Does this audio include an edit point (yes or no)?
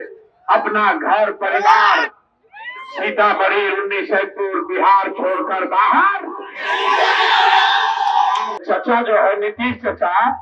yes